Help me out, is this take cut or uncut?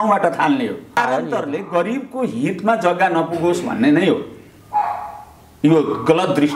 cut